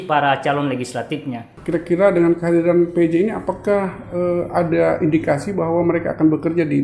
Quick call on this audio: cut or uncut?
cut